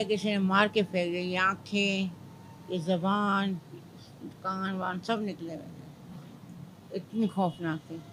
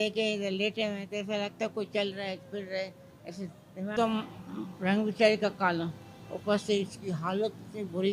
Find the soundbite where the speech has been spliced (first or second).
second